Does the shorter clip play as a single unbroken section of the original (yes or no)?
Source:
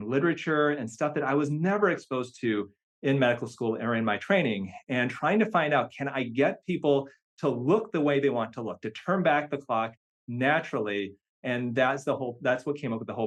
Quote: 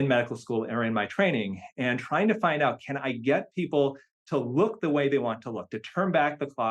yes